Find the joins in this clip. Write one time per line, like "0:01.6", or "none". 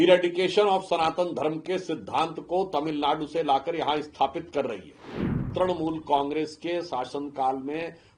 0:05.5